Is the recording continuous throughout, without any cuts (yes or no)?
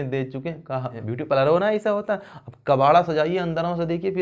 no